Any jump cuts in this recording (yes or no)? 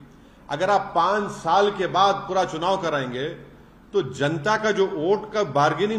no